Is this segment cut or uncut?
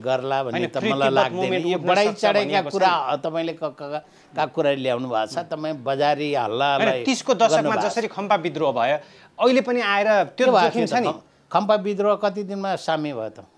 uncut